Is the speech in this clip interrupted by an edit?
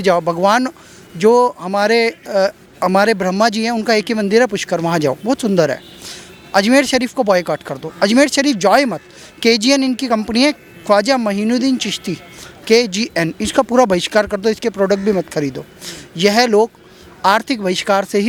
no; 0 cuts

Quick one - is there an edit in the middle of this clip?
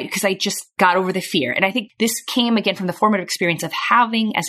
yes; 1 cut; at 1.9 s

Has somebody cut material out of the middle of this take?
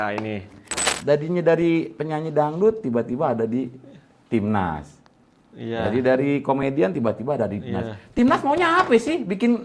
yes; 1 cut; at 0.9 s

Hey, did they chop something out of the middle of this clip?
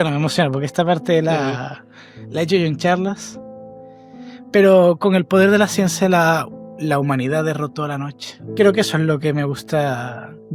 no; 0 cuts

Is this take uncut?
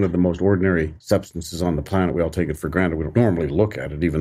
no; 2 cuts; at 1.0 s, 3.1 s

